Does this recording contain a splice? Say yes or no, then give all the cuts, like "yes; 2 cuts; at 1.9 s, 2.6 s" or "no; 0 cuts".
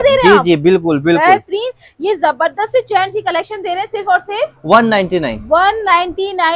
no; 0 cuts